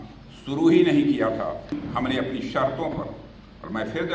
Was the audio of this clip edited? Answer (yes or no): yes